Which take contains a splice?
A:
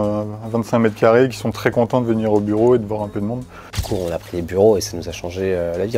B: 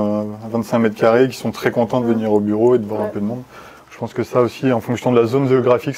A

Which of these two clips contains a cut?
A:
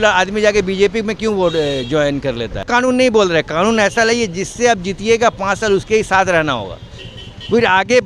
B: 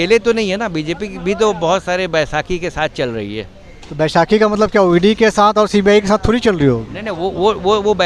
A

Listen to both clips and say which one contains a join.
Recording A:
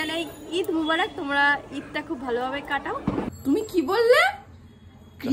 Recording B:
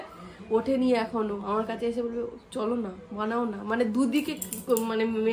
A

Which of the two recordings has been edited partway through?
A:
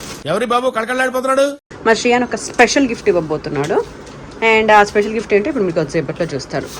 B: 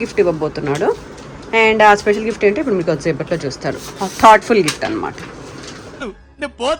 A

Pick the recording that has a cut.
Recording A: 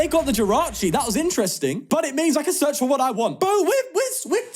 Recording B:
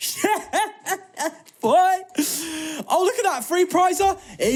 A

